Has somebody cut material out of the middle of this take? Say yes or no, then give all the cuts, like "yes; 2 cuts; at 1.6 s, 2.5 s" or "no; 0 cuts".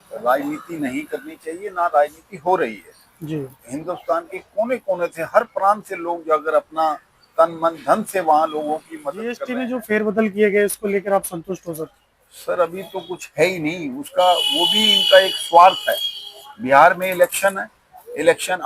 yes; 1 cut; at 9.4 s